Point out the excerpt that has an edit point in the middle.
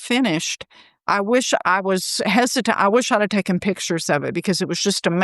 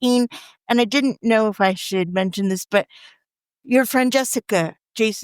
second; 1 cut; at 3.5 s

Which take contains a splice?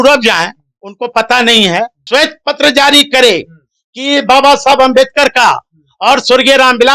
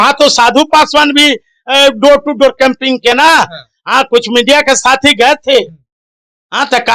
first; 1 cut; at 2.0 s

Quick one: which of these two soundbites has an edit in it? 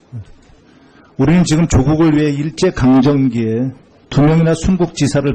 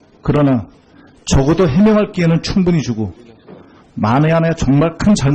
first; 1 cut; at 1.7 s

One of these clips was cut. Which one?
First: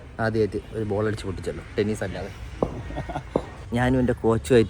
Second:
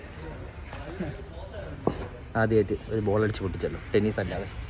first; 1 cut; at 3.6 s

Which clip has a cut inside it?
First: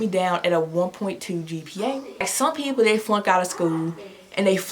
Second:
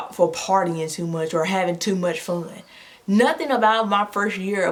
first; 1 cut; at 2.2 s

